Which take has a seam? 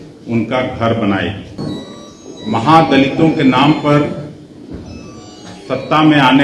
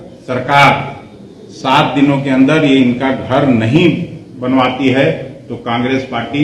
first; 1 cut; at 1.6 s

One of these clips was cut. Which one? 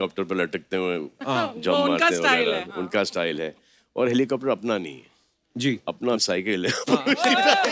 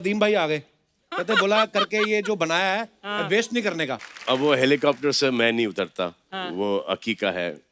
second; 1 cut; at 4.0 s

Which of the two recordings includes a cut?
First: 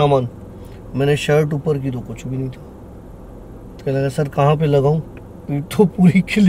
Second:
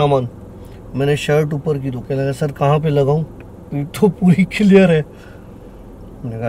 second; 1 cut; at 2.0 s

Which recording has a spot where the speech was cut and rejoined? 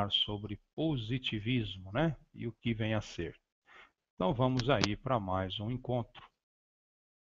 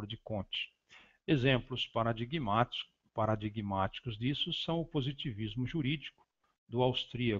second; 1 cut; at 2.9 s

